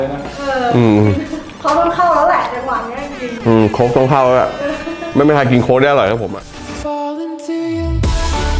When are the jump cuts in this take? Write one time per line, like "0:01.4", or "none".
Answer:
0:06.2